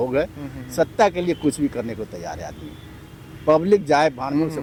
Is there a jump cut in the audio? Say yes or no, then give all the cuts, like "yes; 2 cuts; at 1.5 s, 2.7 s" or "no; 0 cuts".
no; 0 cuts